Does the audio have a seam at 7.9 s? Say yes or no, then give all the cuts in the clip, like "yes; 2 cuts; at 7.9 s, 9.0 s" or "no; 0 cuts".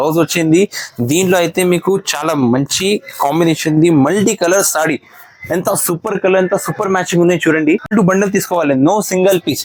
yes; 1 cut; at 7.9 s